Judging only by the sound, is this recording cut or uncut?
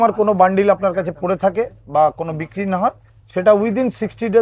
uncut